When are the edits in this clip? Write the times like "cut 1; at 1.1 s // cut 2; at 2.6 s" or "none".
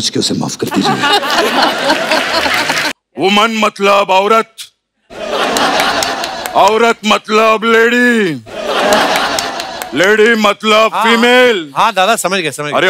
cut 1; at 3.0 s